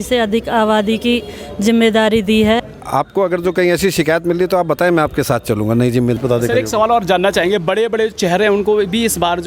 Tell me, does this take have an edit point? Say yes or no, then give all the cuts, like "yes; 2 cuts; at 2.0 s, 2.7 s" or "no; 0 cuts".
yes; 2 cuts; at 2.8 s, 6.2 s